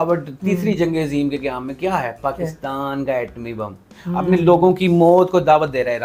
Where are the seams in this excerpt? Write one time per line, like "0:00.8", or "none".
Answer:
0:03.8